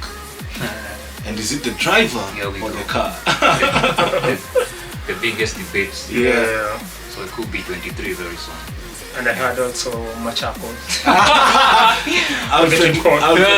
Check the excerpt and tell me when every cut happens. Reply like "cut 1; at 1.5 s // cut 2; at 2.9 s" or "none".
cut 1; at 6.8 s